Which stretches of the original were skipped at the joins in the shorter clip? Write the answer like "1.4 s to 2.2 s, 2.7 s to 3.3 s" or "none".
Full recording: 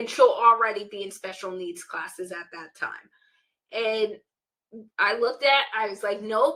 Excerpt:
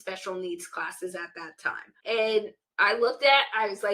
3.0 s to 3.5 s, 4.3 s to 4.8 s